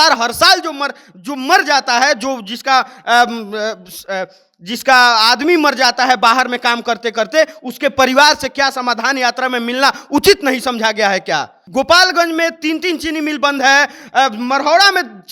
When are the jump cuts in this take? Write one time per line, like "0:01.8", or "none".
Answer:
0:11.6

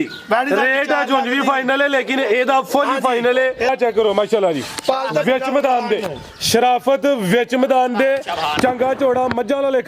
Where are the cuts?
0:03.7

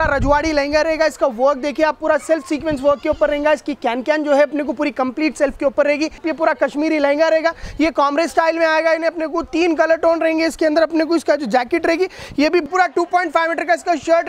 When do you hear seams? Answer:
0:06.3
0:12.7

